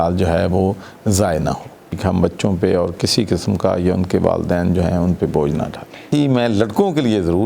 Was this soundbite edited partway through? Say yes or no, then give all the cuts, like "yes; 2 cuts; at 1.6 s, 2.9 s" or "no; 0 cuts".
yes; 2 cuts; at 2.0 s, 6.1 s